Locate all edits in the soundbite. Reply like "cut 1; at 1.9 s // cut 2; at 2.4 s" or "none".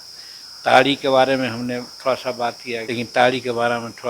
cut 1; at 2.9 s